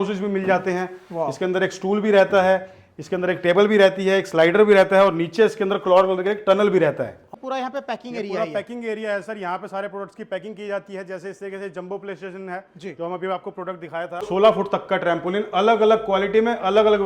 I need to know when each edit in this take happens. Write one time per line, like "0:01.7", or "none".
0:07.3
0:14.3